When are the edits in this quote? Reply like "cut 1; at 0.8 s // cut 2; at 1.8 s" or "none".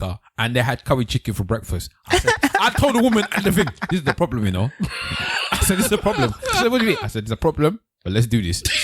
none